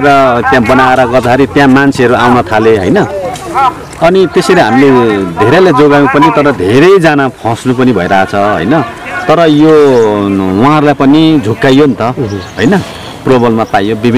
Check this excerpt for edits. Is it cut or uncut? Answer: uncut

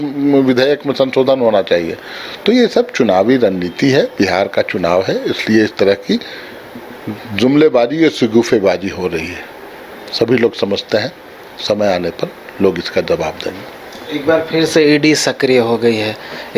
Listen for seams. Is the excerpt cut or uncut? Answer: uncut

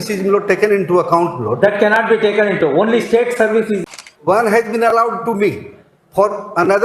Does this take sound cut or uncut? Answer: cut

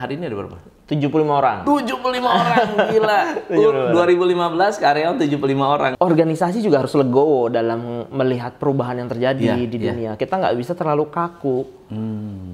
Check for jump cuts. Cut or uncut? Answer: cut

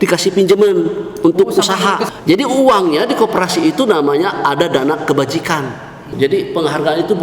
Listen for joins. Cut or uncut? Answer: cut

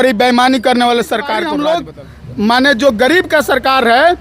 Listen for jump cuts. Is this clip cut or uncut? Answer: cut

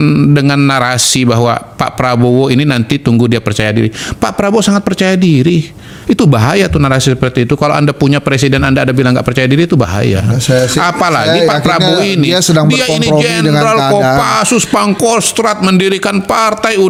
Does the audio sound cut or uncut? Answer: uncut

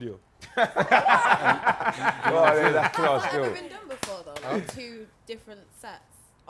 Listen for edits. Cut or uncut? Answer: uncut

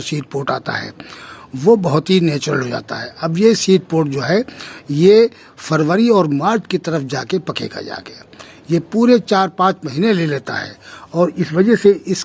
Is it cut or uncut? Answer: uncut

